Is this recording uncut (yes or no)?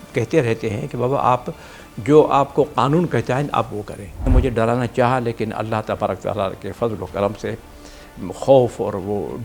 no